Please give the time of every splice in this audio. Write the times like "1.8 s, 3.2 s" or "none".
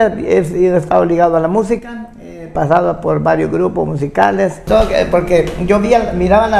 4.6 s